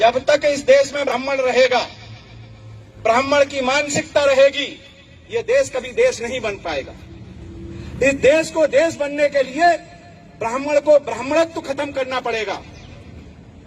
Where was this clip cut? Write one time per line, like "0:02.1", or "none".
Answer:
0:01.1